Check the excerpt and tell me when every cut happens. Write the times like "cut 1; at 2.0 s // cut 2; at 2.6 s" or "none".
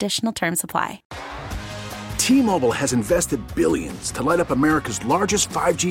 cut 1; at 1.1 s